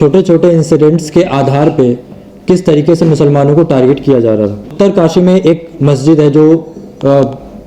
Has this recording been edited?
yes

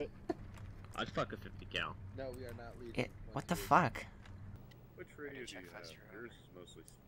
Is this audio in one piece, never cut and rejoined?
no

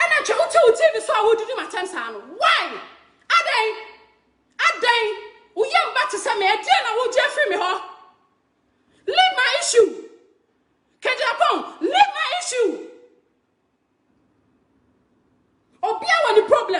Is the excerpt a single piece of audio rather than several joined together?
yes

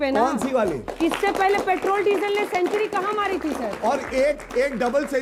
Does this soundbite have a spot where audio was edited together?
no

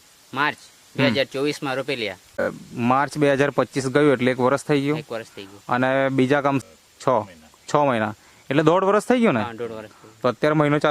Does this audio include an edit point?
yes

